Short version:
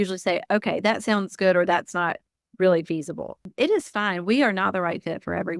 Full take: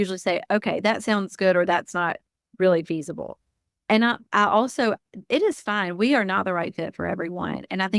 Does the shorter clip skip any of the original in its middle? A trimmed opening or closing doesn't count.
yes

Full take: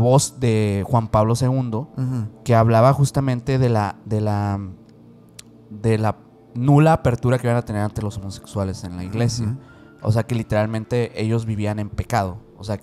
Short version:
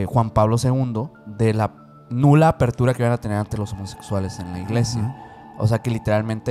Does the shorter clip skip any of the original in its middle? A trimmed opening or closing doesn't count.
yes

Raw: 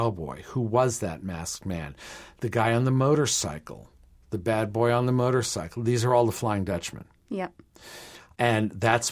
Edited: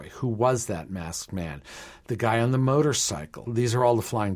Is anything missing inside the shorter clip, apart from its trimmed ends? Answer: yes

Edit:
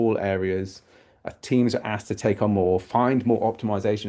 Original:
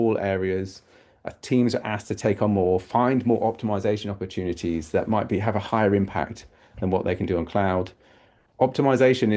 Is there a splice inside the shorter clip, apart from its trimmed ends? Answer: no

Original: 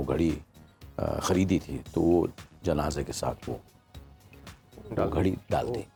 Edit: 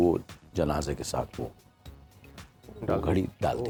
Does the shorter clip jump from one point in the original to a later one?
no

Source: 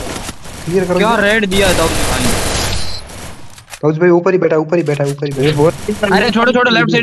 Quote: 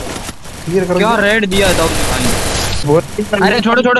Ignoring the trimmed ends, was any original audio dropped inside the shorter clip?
yes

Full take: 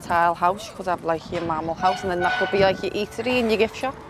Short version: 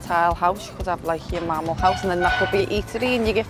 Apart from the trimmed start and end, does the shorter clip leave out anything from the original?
yes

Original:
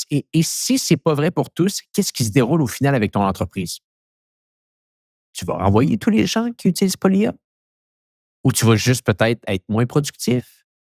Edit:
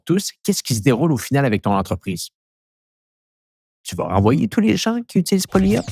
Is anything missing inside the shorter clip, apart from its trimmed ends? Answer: no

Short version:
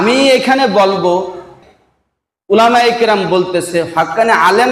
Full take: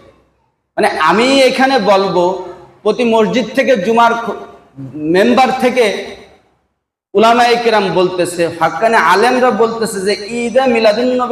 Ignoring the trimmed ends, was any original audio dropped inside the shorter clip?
yes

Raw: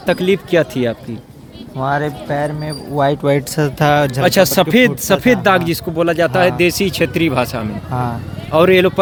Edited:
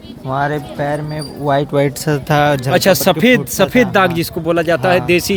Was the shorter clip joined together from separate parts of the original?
no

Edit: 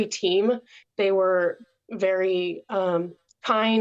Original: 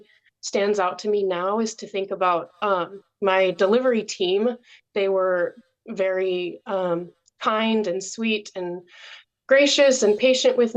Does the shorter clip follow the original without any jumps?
yes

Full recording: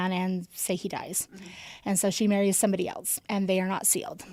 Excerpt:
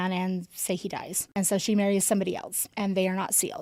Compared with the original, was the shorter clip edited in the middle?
yes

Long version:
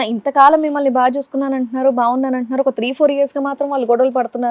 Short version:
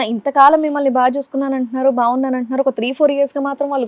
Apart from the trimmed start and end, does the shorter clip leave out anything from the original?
no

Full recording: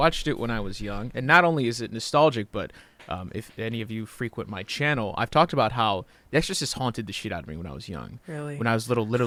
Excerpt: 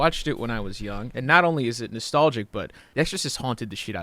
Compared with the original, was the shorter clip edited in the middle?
yes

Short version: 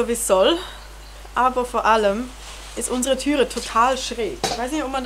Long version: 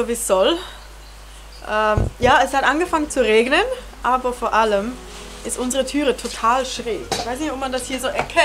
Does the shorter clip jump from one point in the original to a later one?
yes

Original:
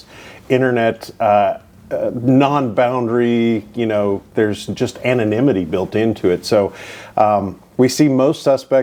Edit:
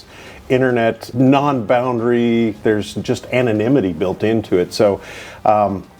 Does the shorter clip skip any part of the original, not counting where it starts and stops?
yes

